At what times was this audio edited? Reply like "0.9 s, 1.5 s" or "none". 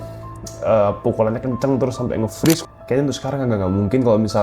2.6 s